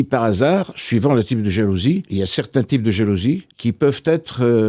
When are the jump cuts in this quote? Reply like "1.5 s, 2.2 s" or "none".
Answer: 2.1 s, 3.5 s